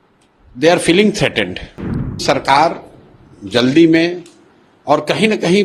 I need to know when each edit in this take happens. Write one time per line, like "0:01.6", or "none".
0:02.1